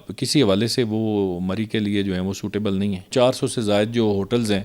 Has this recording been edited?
yes; 1 cut; at 3.1 s

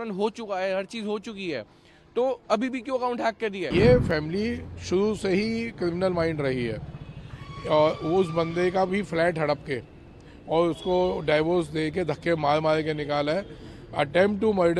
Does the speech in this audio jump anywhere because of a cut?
yes; 1 cut; at 3.6 s

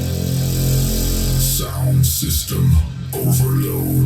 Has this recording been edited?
no; 0 cuts

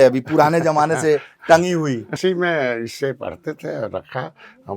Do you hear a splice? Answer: yes; 1 cut; at 2.2 s

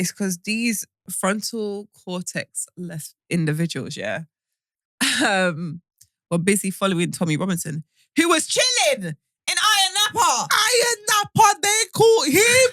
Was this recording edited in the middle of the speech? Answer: yes; 1 cut; at 1.0 s

